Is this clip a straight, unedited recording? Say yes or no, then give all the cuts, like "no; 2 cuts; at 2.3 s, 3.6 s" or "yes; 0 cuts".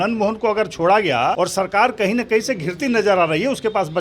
no; 1 cut; at 1.4 s